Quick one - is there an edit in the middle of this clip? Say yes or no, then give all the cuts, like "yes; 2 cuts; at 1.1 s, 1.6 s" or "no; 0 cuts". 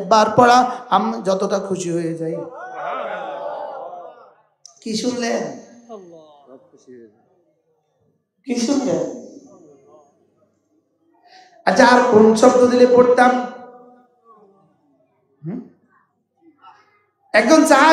no; 0 cuts